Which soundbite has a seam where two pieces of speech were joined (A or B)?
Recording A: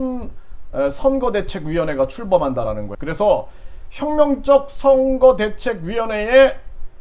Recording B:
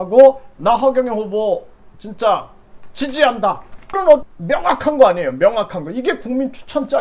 B